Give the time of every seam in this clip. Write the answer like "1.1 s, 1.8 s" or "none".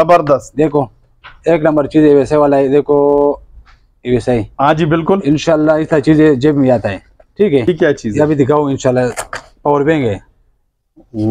7.7 s